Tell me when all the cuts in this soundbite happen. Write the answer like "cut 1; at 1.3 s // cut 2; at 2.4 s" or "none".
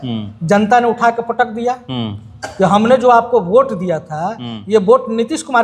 none

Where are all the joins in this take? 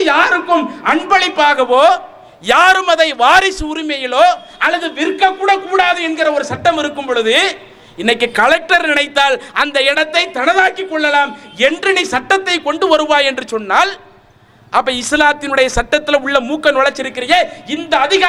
none

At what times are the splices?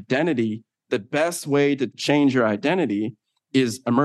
cut 1; at 2.0 s

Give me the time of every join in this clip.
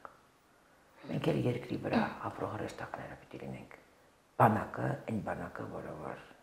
none

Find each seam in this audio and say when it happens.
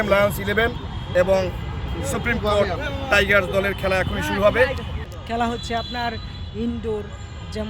cut 1; at 4.9 s

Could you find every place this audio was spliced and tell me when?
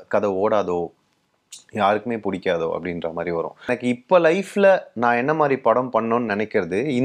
cut 1; at 3.7 s

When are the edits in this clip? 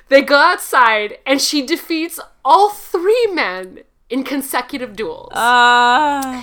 none

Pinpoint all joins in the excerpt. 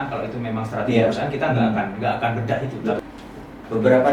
cut 1; at 3.0 s

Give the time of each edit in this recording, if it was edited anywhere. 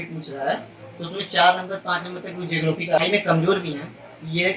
cut 1; at 3.0 s

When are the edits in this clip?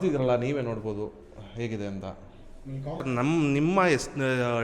cut 1; at 3.0 s

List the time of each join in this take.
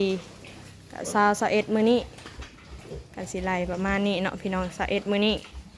none

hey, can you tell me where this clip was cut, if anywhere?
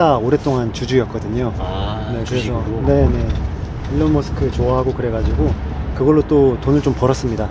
none

